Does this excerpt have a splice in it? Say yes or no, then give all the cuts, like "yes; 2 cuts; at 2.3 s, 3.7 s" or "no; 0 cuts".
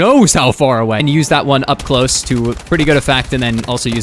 yes; 1 cut; at 1.0 s